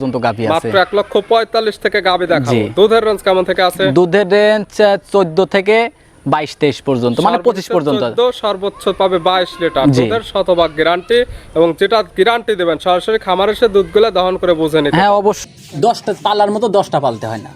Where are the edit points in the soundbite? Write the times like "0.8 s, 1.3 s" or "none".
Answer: 15.4 s